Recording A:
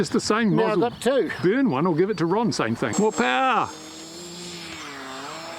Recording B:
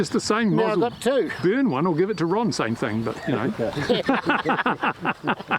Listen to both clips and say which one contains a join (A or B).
A